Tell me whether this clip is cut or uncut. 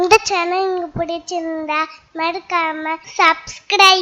cut